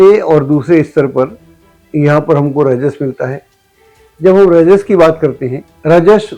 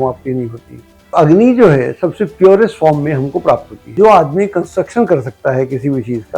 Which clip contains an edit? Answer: second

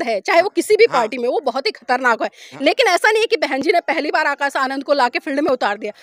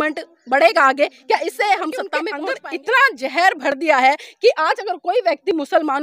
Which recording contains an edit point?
second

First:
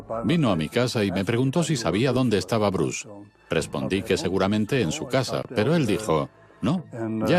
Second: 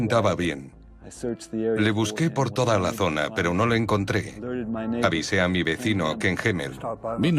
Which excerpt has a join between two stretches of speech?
first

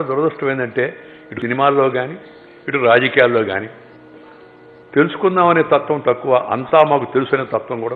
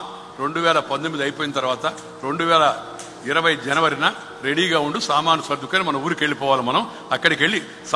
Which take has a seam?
first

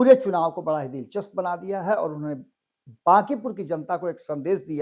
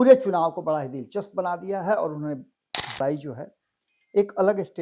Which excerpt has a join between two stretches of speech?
second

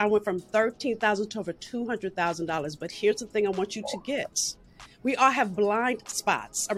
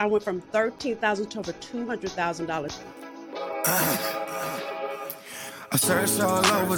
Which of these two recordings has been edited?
second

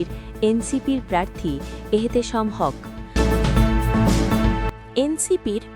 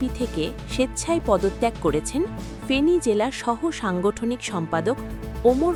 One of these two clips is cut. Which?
first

